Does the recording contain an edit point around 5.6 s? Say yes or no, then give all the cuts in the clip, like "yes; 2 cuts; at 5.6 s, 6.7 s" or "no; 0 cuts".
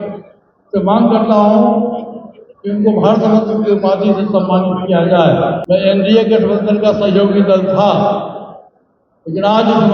yes; 1 cut; at 5.6 s